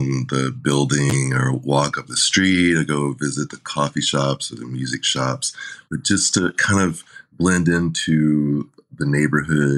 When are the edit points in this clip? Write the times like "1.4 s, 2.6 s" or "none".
none